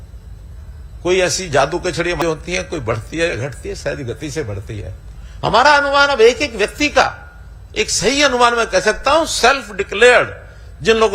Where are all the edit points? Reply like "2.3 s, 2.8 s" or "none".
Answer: 2.2 s